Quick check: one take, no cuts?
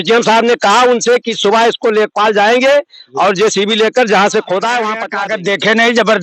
no; 1 cut; at 5.0 s

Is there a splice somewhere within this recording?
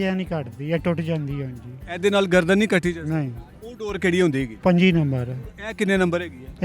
yes; 1 cut; at 4.5 s

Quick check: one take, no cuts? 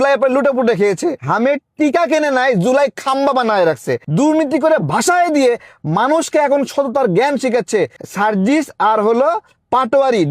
no; 3 cuts; at 1.2 s, 4.0 s, 8.0 s

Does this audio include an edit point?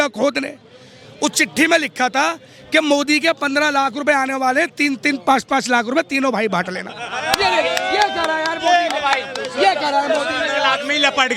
no; 0 cuts

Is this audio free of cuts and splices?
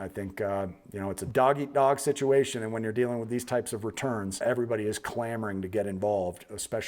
no; 2 cuts; at 1.2 s, 4.4 s

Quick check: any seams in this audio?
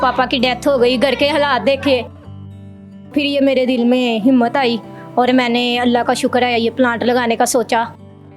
yes; 1 cut; at 3.1 s

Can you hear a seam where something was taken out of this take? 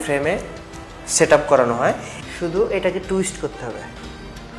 yes; 1 cut; at 2.1 s

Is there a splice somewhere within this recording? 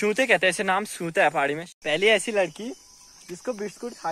yes; 1 cut; at 1.7 s

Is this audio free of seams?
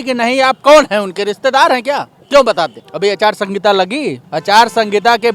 no; 3 cuts; at 2.1 s, 2.8 s, 4.3 s

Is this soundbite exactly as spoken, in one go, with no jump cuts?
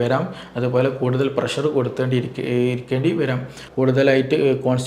no; 1 cut; at 3.6 s

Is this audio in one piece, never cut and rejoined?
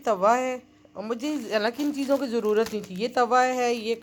yes; 0 cuts

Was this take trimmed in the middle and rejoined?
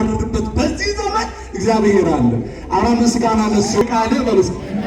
yes; 1 cut; at 3.8 s

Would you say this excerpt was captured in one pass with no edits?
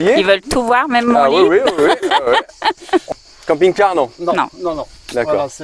no; 1 cut; at 3.1 s

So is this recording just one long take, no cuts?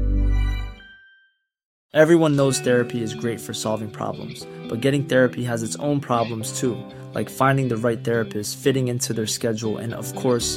no; 1 cut; at 1.8 s

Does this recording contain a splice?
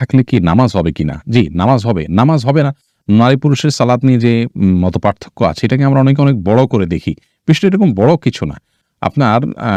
no; 0 cuts

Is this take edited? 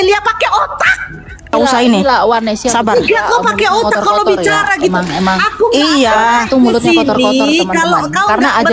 yes; 1 cut; at 1.5 s

